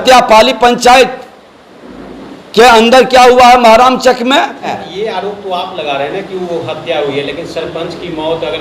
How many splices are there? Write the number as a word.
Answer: one